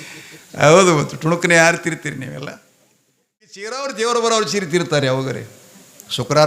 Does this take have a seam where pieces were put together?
yes; 1 cut; at 3.7 s

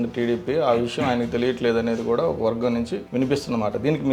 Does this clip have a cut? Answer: yes; 1 cut; at 3.0 s

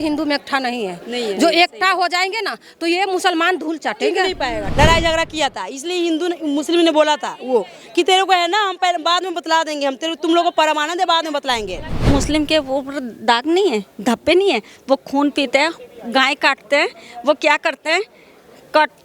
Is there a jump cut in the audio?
yes; 2 cuts; at 4.7 s, 11.9 s

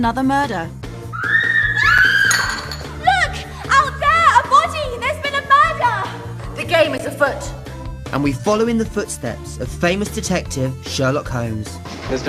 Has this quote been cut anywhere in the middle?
yes; 1 cut; at 6.6 s

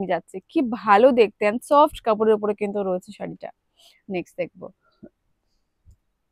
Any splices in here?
no; 0 cuts

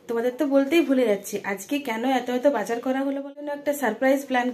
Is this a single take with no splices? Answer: no; 1 cut; at 3.6 s

